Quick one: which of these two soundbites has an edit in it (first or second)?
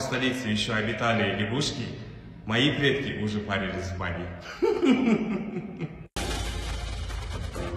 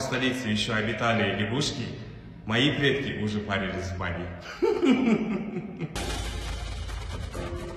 second